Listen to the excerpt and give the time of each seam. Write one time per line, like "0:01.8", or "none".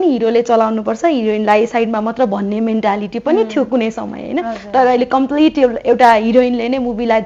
none